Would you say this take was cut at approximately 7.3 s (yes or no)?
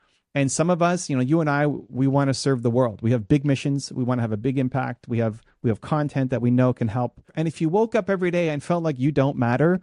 yes